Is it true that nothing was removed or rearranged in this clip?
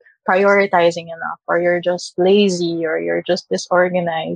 yes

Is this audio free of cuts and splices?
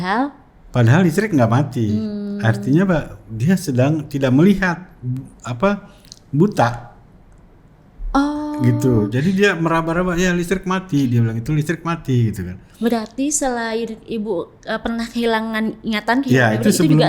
yes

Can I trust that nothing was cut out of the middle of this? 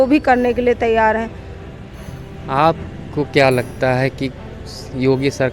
yes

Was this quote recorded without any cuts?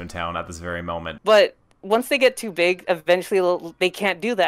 no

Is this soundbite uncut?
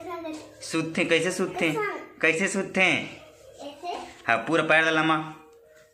yes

